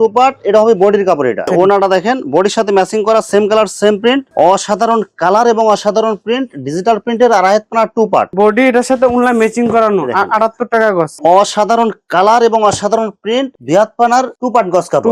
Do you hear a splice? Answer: yes; 4 cuts; at 1.5 s, 4.3 s, 8.3 s, 11.1 s

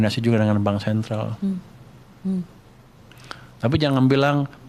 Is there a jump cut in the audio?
no; 0 cuts

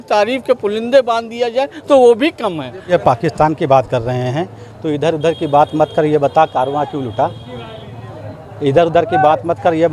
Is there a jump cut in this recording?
yes; 1 cut; at 2.9 s

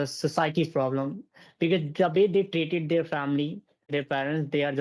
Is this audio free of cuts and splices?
no; 1 cut; at 3.9 s

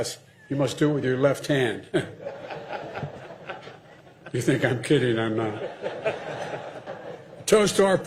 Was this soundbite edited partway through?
no; 0 cuts

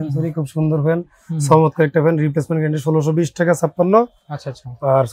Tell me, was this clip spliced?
no; 0 cuts

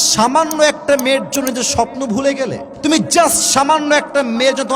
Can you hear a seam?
yes; 1 cut; at 2.7 s

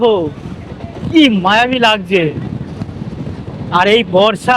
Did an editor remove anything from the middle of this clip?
no; 0 cuts

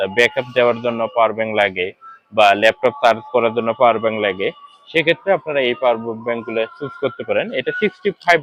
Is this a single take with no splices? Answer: yes; 0 cuts

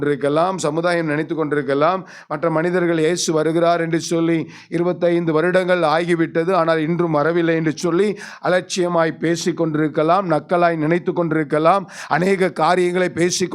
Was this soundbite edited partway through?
no; 0 cuts

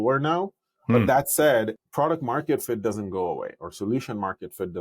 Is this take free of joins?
no; 1 cut; at 1.8 s

